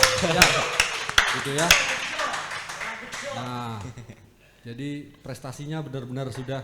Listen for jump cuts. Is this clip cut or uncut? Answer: uncut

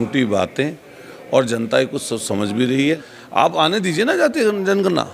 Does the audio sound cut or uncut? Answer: cut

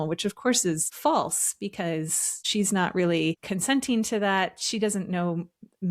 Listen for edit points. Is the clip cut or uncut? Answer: cut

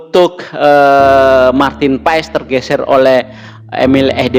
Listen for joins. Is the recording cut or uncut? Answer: uncut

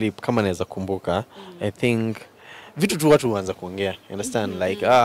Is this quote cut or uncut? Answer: uncut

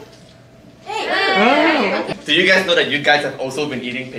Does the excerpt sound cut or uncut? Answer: uncut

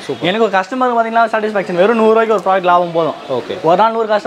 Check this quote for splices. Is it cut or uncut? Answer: uncut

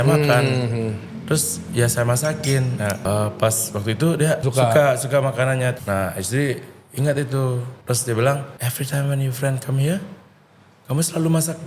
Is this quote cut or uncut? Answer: cut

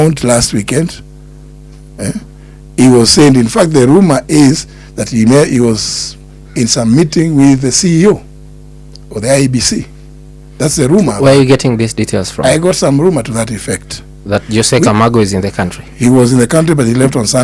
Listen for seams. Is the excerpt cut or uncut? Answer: uncut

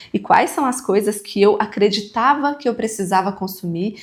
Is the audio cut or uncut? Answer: uncut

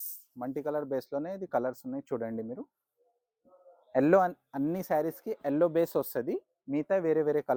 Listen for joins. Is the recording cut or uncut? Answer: uncut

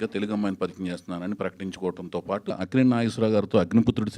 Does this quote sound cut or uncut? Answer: cut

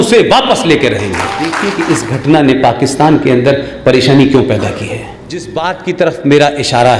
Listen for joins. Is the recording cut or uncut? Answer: cut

